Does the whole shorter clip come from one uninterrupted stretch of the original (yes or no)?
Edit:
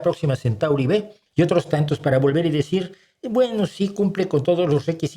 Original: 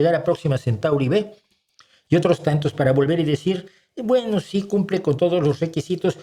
no